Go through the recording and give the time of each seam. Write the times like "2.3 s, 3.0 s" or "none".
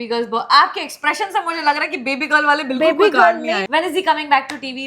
3.6 s